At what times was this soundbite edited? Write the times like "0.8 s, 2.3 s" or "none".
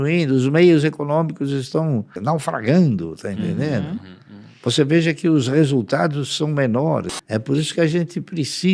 2.2 s, 7.2 s